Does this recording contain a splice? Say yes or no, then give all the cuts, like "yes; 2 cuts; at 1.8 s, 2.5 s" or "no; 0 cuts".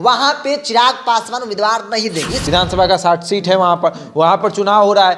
yes; 1 cut; at 2.4 s